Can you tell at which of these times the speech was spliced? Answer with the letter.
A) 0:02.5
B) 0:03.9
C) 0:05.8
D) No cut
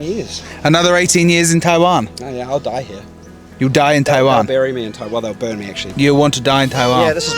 C